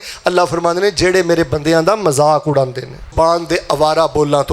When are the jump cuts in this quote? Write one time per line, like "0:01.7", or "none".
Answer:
0:03.1

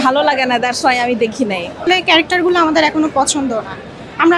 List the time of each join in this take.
0:01.8

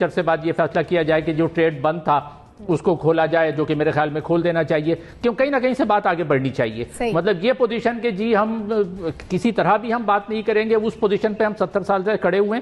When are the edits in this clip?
none

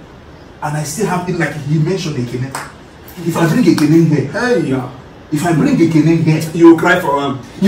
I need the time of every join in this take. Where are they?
none

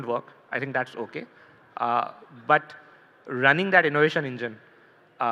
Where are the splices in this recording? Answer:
none

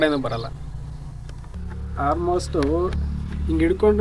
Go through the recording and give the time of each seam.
0:01.4

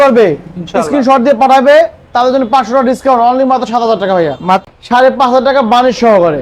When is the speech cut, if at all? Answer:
0:04.6

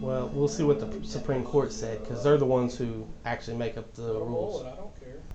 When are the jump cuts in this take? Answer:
none

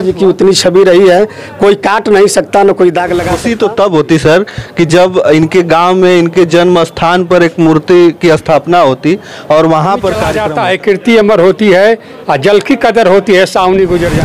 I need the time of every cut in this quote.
0:03.4
0:10.4

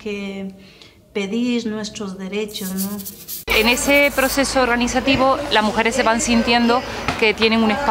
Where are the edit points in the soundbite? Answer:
0:03.5

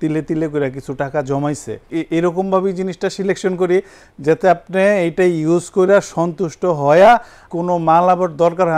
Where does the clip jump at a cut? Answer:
0:01.9
0:07.4

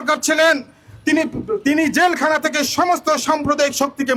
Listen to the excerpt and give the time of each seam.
none

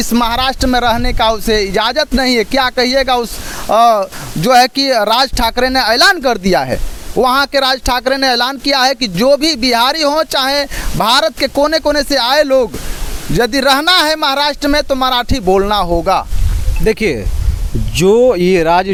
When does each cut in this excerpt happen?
none

